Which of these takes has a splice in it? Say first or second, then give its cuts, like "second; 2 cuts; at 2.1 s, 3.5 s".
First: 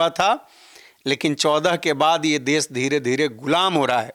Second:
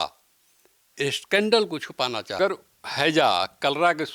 second; 1 cut; at 2.4 s